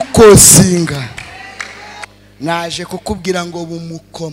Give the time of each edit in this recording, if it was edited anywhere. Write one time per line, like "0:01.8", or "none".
0:02.1